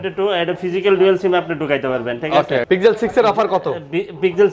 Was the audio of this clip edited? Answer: yes; 1 cut; at 2.7 s

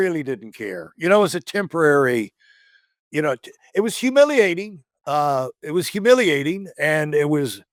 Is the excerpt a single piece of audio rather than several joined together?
yes; 0 cuts

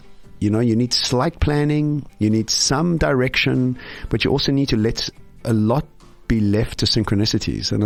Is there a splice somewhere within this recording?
no; 0 cuts

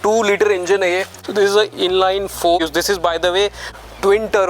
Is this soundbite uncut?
no; 1 cut; at 2.6 s

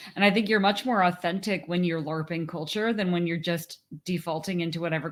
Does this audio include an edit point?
no; 0 cuts

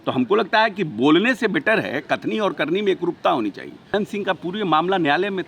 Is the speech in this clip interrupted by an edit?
yes; 1 cut; at 3.9 s

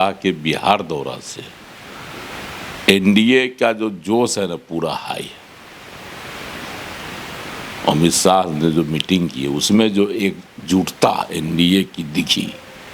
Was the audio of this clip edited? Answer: no; 0 cuts

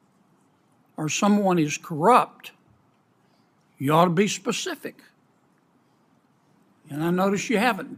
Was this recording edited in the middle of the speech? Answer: no; 0 cuts

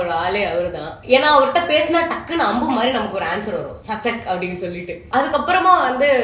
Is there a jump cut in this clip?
yes; 2 cuts; at 0.9 s, 5.1 s

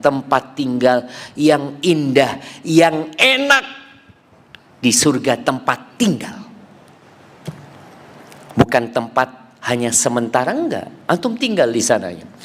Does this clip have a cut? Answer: no; 0 cuts

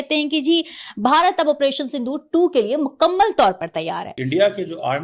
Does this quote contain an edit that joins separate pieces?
yes; 1 cut; at 4.1 s

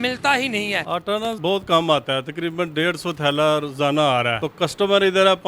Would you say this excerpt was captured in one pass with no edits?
no; 2 cuts; at 0.9 s, 4.4 s

